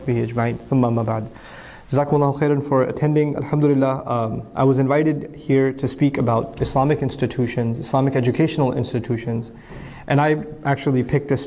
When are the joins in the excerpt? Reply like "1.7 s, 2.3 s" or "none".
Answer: 9.0 s